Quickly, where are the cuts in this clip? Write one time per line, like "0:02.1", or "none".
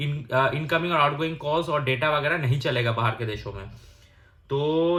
none